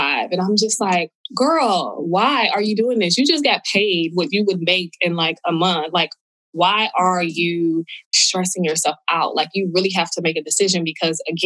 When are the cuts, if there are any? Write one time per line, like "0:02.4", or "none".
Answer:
none